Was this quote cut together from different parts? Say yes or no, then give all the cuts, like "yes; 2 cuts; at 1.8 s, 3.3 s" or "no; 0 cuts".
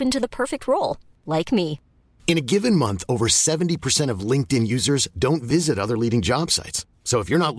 no; 0 cuts